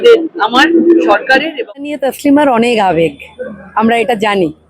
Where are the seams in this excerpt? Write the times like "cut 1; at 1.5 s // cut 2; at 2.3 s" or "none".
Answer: cut 1; at 1.9 s